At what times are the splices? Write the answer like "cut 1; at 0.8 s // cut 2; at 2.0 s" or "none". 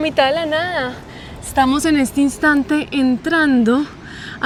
none